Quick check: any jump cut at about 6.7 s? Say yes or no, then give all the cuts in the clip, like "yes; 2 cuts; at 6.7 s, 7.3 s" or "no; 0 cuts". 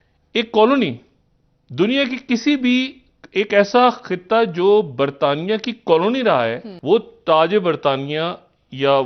yes; 1 cut; at 6.7 s